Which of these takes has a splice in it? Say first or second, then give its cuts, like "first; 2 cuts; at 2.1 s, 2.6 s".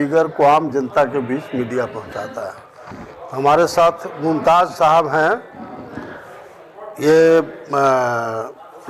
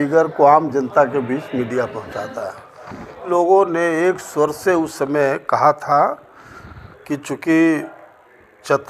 second; 1 cut; at 3.3 s